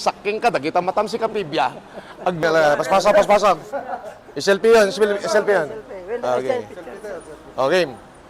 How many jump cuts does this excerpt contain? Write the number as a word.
one